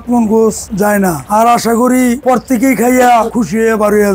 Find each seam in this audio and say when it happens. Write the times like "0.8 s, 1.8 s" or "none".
none